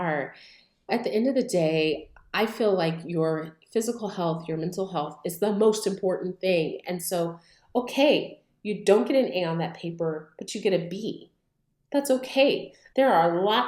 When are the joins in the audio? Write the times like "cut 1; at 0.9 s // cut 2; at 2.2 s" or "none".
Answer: cut 1; at 12.8 s